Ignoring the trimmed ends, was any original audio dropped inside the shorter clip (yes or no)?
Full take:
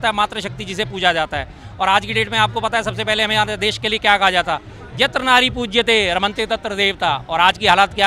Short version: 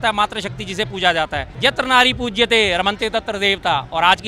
yes